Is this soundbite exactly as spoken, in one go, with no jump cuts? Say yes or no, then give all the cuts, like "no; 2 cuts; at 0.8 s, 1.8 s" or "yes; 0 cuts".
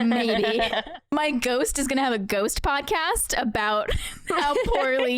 no; 1 cut; at 1.0 s